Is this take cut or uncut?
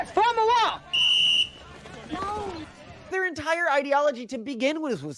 cut